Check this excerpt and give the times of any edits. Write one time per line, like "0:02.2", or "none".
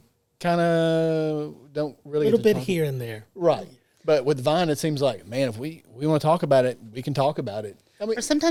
none